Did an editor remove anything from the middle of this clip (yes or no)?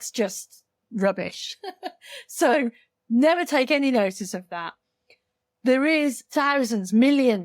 yes